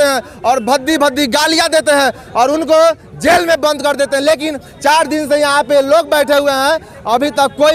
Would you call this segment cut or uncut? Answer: uncut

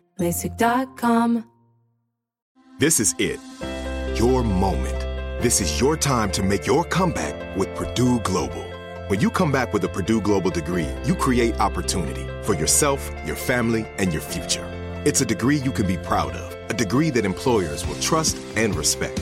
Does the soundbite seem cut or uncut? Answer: uncut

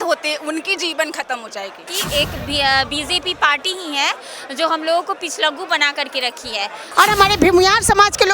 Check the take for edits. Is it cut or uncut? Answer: cut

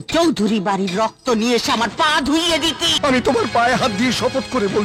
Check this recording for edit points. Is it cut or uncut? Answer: cut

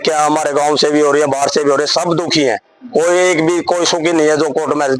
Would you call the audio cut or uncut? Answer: uncut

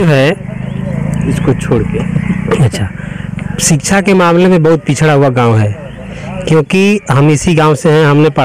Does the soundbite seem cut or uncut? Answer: uncut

